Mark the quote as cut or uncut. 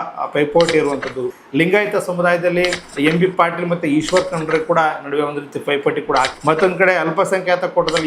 cut